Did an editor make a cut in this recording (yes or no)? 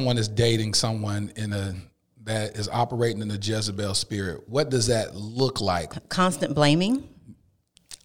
yes